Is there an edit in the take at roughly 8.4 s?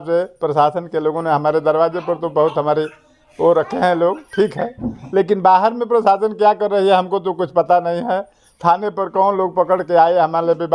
no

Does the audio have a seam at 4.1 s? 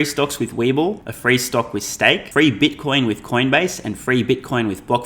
no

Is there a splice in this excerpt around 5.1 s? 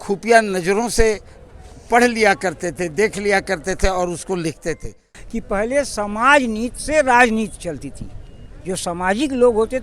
yes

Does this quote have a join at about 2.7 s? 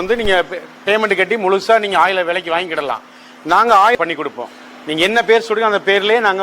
no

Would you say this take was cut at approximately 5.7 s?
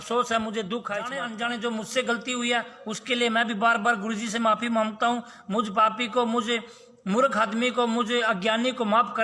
no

